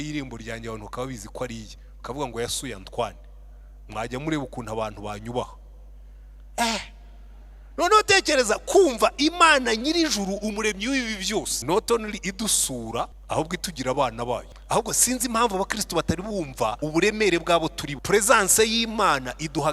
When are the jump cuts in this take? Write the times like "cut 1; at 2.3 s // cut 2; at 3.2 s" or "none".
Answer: cut 1; at 11.5 s // cut 2; at 13.2 s // cut 3; at 14.5 s // cut 4; at 16.8 s // cut 5; at 17.9 s

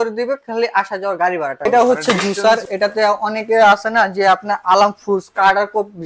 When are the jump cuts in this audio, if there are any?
cut 1; at 1.6 s

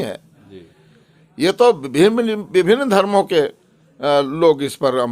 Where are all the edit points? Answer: none

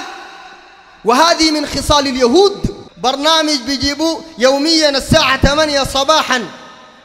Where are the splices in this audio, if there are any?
cut 1; at 2.9 s

